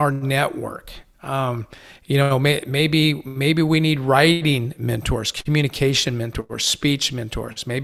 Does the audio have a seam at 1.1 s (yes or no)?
no